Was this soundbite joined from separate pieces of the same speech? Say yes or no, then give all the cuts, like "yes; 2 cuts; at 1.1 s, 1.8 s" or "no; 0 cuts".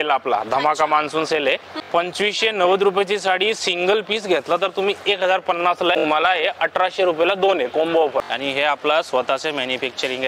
yes; 3 cuts; at 1.8 s, 6.0 s, 8.3 s